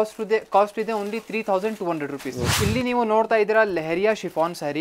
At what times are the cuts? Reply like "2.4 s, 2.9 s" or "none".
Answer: 2.4 s